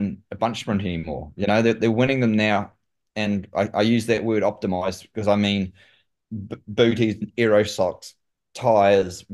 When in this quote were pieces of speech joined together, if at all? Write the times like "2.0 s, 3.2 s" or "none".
none